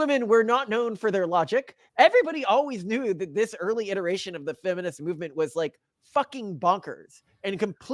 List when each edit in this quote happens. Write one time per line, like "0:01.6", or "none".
0:01.8

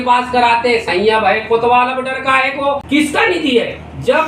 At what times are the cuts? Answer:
0:02.8

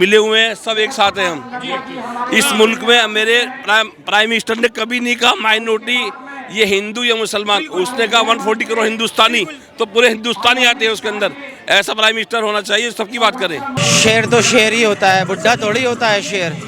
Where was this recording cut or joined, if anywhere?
0:13.8

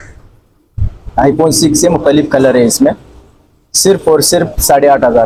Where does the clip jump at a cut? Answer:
none

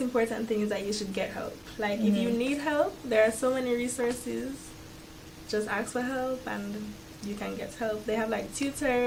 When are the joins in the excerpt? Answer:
none

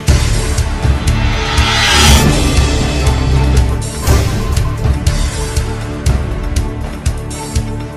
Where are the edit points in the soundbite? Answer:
none

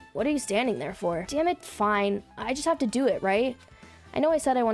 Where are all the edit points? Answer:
0:01.3

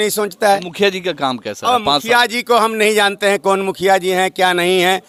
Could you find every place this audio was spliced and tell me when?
none

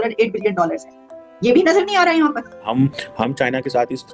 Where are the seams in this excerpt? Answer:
0:02.6

